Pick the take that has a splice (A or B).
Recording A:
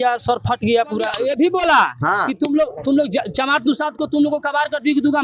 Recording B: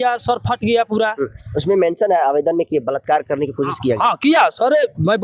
A